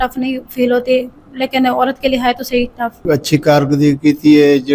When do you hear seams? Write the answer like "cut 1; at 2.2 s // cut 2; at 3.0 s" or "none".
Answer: cut 1; at 3.0 s